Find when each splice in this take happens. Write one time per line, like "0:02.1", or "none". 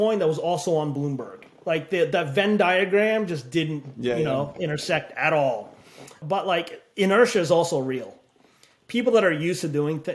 0:06.1